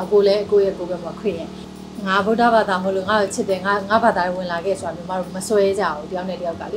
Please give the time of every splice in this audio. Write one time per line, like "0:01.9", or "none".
0:01.6